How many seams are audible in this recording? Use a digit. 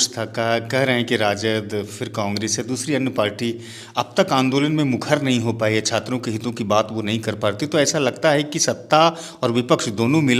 0